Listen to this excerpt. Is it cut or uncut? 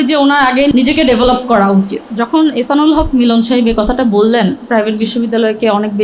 cut